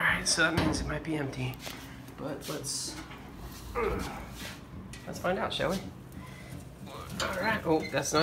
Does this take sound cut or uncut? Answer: cut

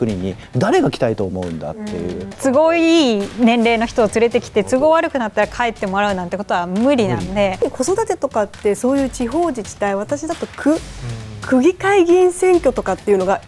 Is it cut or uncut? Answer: cut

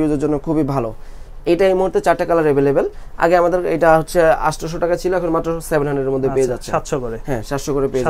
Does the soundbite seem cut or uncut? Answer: uncut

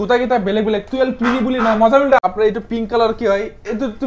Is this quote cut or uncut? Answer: cut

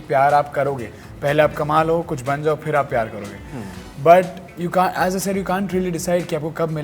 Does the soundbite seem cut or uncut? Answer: uncut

